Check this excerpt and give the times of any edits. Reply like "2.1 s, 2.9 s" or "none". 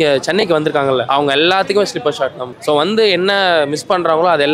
1.0 s, 2.5 s